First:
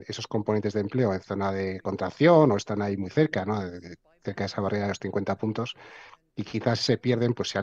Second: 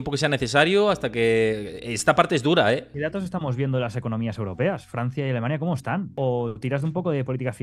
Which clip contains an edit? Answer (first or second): second